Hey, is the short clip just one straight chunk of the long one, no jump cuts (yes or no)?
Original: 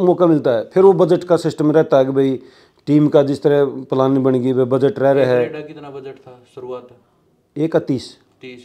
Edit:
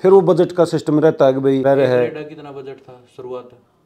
no